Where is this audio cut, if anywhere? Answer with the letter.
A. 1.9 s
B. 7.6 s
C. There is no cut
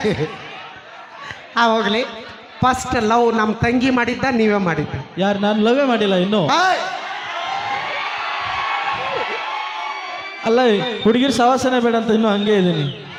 C